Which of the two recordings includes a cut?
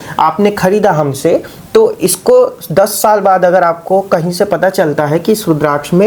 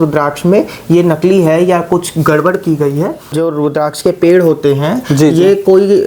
second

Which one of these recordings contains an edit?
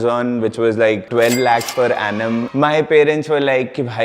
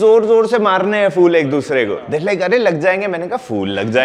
first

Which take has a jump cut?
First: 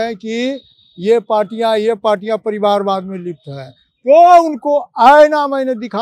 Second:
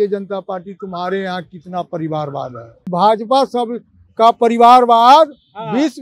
second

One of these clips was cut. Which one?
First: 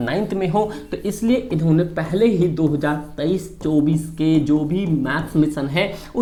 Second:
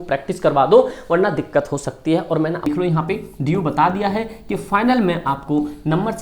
second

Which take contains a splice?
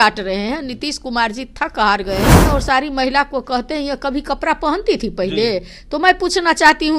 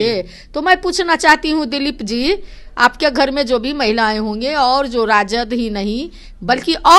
first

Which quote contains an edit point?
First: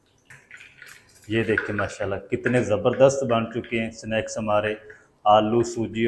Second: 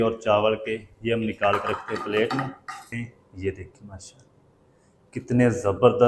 second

